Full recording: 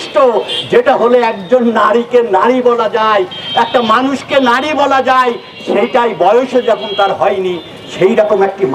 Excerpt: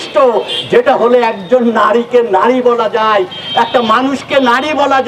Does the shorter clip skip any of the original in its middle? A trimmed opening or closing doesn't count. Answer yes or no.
no